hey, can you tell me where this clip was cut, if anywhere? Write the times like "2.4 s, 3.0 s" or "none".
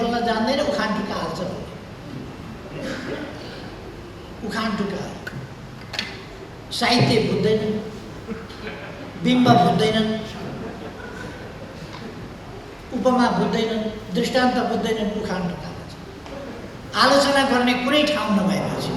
none